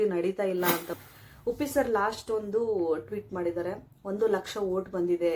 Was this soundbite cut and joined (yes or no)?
yes